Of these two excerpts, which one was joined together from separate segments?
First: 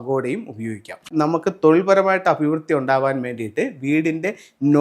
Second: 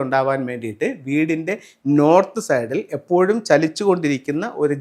first; 1 cut; at 1.1 s

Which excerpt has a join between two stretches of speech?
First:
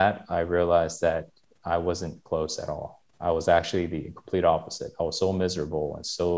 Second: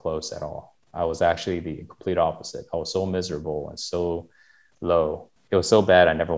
second; 1 cut; at 5.3 s

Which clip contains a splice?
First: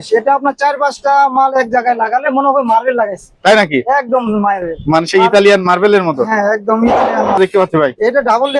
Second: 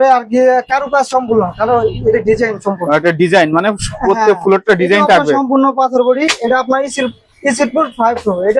first; 1 cut; at 7.4 s

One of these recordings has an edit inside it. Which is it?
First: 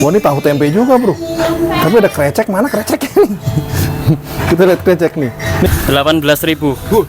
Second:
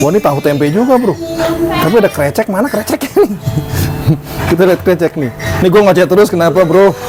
first; 1 cut; at 5.7 s

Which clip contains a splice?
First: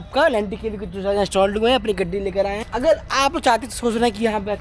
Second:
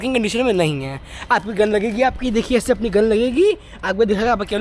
first; 1 cut; at 2.6 s

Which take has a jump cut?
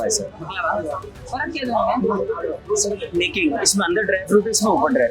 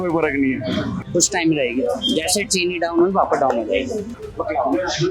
second; 2 cuts; at 1.0 s, 4.1 s

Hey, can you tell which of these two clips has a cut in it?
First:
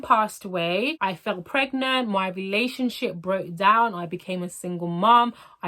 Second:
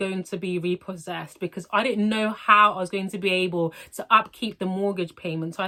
first; 1 cut; at 0.9 s

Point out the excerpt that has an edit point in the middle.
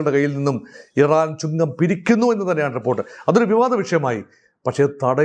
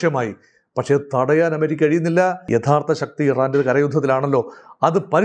second; 1 cut; at 2.4 s

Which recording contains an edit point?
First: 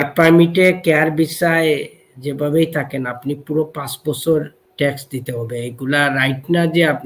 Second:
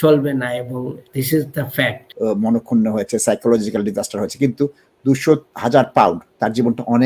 second; 3 cuts; at 1.0 s, 2.0 s, 5.5 s

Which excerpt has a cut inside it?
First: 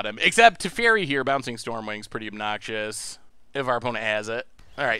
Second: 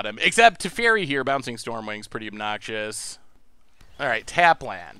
second; 1 cut; at 3.6 s

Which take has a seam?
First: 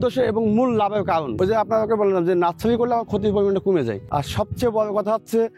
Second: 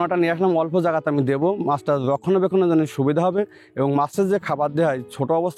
first; 2 cuts; at 1.3 s, 4.0 s

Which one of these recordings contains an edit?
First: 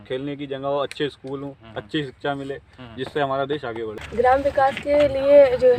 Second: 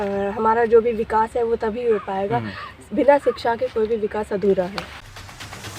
second; 1 cut; at 4.8 s

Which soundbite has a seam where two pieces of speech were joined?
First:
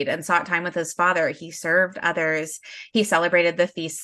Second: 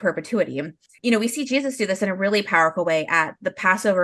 second; 1 cut; at 0.9 s

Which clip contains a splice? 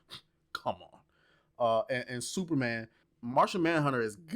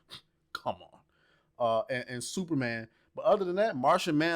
first; 1 cut; at 3.1 s

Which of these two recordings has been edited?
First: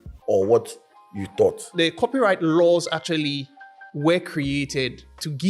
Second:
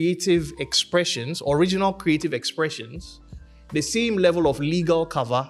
first; 1 cut; at 1.7 s

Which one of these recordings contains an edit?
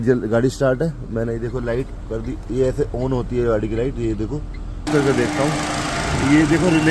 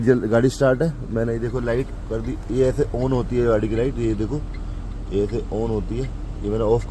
first; 1 cut; at 4.9 s

